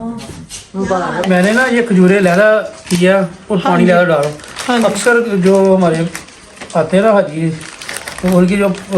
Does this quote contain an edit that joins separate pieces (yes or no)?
yes